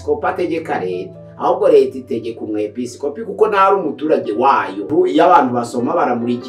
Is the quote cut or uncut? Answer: cut